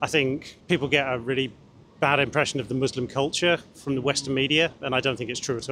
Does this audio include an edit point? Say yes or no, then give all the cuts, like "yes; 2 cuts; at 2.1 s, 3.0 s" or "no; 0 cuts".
no; 0 cuts